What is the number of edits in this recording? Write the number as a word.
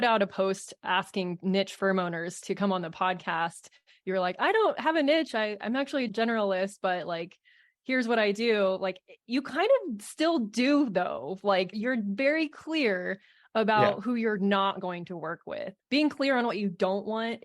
three